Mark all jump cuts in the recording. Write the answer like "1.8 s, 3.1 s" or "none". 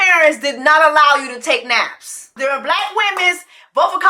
2.4 s

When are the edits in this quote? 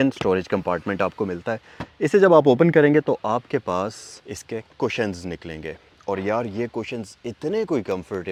none

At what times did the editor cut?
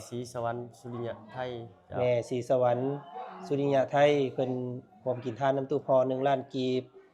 none

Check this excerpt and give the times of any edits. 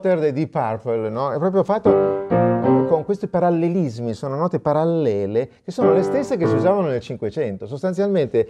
none

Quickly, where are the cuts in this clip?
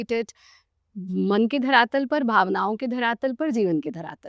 none

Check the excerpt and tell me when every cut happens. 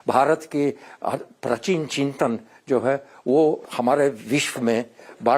3.6 s

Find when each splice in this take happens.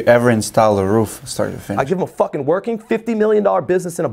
1.7 s

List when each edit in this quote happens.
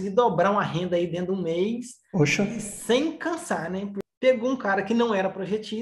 4.0 s

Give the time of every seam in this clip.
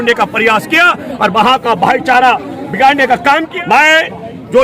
3.5 s

